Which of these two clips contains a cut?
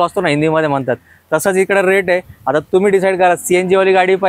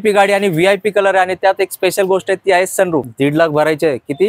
second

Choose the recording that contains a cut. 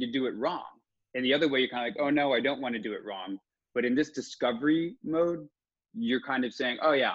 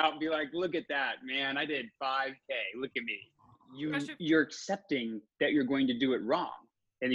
second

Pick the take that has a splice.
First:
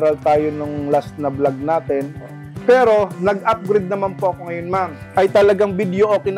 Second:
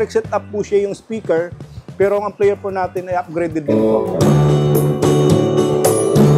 first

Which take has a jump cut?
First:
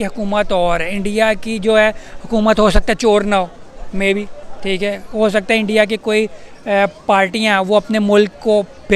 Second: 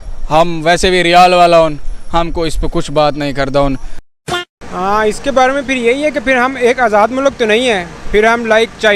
second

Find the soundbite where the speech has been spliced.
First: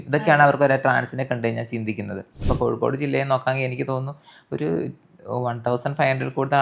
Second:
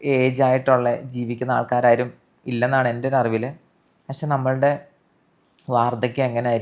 first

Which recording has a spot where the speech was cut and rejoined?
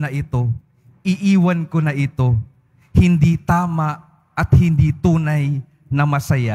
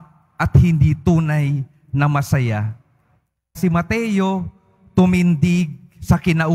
second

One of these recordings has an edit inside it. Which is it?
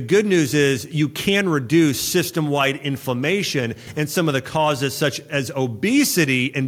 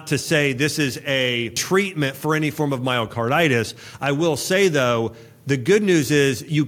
second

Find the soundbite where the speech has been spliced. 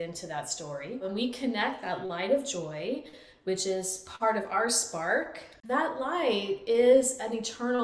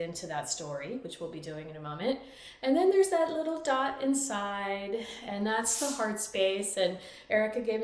first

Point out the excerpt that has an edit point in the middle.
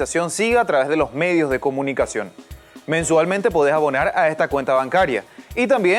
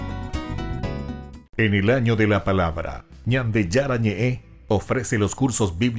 second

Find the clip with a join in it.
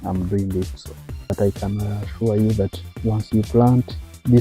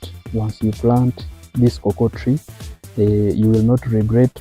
first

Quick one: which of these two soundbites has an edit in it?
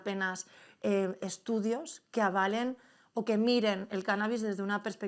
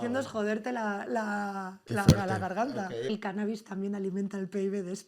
second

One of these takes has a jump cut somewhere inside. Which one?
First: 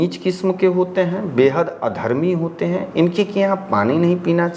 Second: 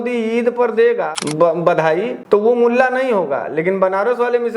second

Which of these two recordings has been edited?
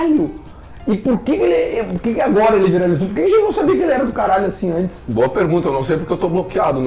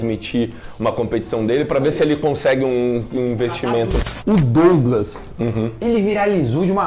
second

